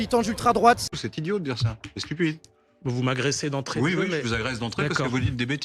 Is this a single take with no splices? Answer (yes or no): no